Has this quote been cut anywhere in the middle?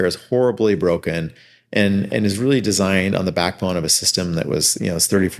no; 0 cuts

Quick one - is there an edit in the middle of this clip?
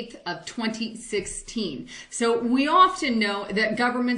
yes; 1 cut; at 2.5 s

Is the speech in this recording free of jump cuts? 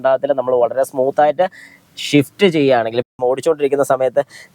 no; 1 cut; at 3.1 s

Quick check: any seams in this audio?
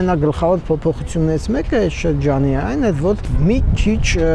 no; 0 cuts

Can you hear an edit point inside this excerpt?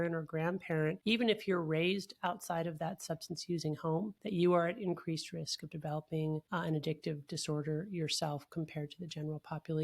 yes; 3 cuts; at 1.0 s, 4.2 s, 6.4 s

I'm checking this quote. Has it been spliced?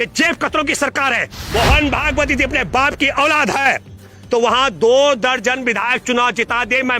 yes; 1 cut; at 1.3 s

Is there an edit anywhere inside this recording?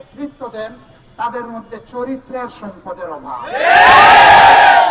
no; 0 cuts

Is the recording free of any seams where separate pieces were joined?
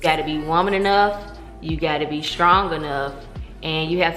yes; 0 cuts

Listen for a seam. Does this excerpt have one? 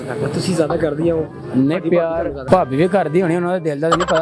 yes; 1 cut; at 2.4 s

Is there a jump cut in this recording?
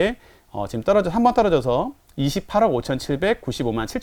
no; 0 cuts

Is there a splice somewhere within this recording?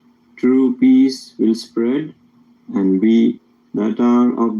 yes; 1 cut; at 3.4 s

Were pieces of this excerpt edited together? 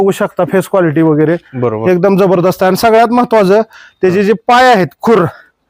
no; 0 cuts

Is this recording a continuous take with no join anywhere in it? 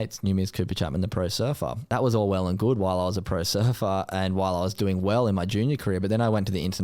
no; 1 cut; at 1.8 s

